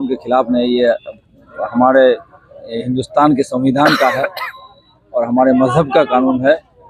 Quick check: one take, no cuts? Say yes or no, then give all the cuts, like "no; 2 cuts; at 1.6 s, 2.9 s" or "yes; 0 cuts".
yes; 0 cuts